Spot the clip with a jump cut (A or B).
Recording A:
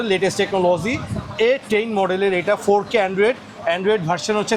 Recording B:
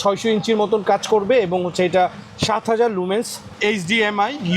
B